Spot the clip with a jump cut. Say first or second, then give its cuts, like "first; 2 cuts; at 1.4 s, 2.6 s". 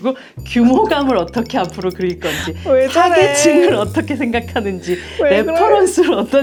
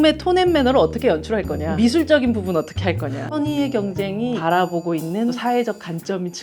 second; 4 cuts; at 1.6 s, 3.2 s, 4.4 s, 5.4 s